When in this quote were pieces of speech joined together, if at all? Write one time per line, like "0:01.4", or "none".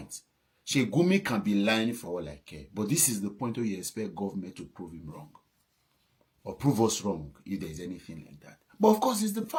none